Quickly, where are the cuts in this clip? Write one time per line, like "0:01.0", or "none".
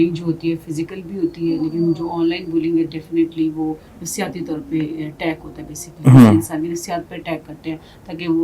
none